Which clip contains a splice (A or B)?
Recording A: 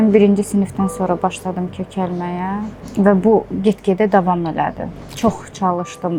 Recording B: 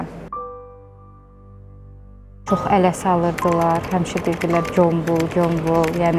B